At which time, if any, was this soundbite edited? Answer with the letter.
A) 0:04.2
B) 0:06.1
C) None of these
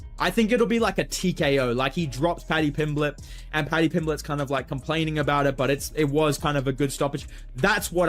B